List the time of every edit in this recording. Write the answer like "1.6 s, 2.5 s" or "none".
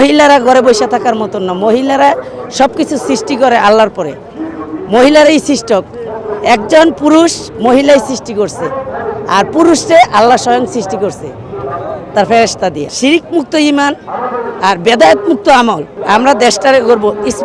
12.9 s, 15.9 s